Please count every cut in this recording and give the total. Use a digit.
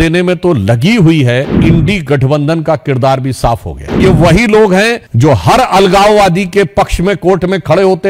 3